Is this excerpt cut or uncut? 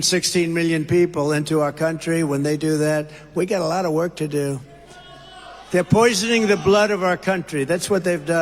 uncut